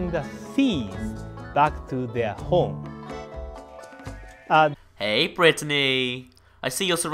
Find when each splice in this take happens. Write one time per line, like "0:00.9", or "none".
none